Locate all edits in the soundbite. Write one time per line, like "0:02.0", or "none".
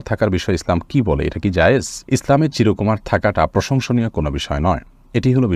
none